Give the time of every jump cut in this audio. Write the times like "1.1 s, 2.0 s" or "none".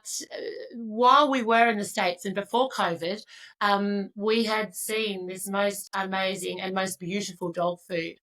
none